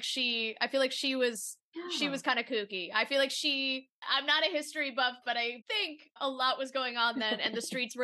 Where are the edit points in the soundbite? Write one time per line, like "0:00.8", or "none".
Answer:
0:04.0
0:05.6